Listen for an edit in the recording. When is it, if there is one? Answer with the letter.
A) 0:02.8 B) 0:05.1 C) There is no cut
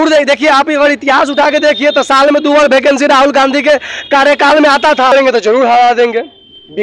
B